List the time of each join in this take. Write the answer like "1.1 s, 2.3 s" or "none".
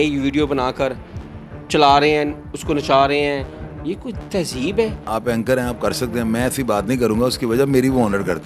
5.0 s